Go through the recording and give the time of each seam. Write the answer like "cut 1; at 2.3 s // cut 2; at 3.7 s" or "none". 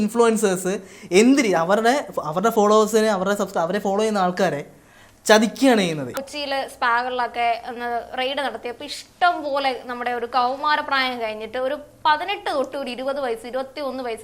cut 1; at 6.2 s